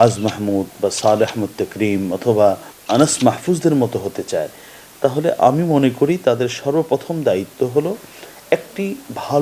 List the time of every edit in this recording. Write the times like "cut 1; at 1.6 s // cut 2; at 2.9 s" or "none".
cut 1; at 2.7 s